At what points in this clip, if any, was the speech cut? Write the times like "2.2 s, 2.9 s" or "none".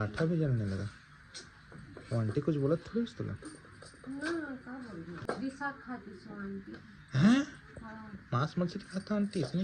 5.2 s